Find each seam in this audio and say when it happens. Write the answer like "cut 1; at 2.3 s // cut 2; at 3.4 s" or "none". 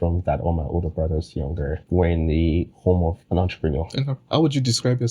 cut 1; at 1.8 s // cut 2; at 3.2 s // cut 3; at 4.1 s